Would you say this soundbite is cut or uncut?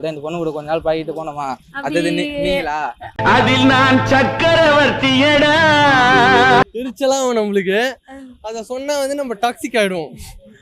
cut